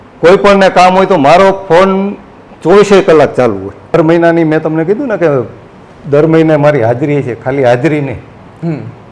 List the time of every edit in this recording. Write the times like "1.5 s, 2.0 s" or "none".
3.9 s